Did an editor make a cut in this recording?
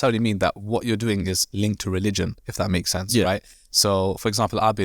no; 0 cuts

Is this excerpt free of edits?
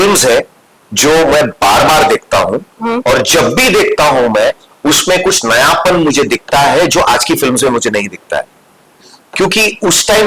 yes; 0 cuts

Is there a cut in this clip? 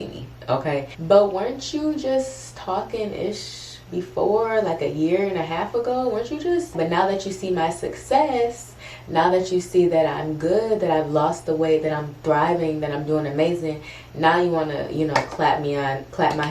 yes; 2 cuts; at 0.9 s, 6.7 s

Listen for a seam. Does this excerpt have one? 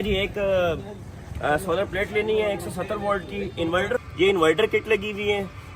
yes; 1 cut; at 4.0 s

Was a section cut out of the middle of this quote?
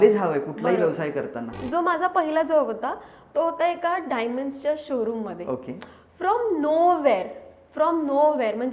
yes; 1 cut; at 1.6 s

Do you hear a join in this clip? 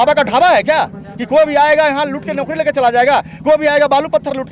no; 0 cuts

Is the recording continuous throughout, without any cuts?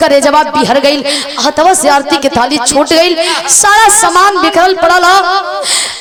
yes; 0 cuts

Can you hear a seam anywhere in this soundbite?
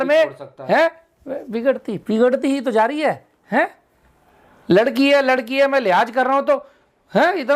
no; 0 cuts

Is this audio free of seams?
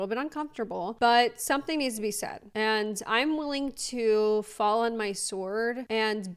yes; 0 cuts

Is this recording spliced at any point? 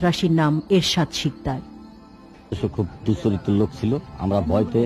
no; 0 cuts

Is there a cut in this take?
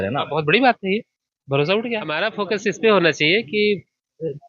yes; 1 cut; at 2.2 s

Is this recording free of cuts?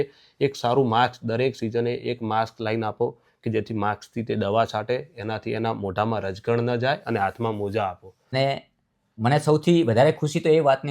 no; 1 cut; at 8.3 s

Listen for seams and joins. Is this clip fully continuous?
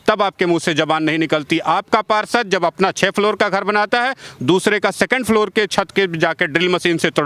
yes; 0 cuts

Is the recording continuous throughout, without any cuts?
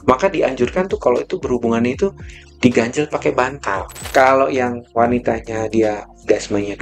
no; 1 cut; at 4.0 s

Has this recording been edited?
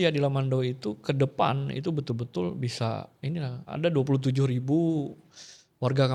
no; 0 cuts

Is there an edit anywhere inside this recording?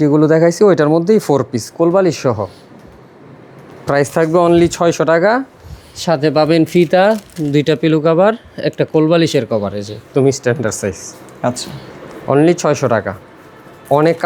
no; 0 cuts

